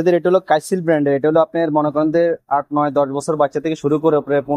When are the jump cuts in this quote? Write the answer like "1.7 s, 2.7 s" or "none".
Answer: none